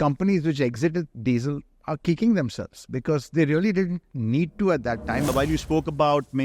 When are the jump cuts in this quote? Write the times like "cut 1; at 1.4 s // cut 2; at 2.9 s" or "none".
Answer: cut 1; at 5.3 s